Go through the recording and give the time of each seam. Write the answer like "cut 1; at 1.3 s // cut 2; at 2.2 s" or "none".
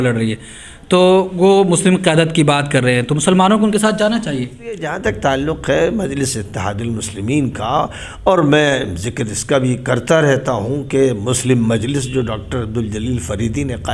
cut 1; at 4.9 s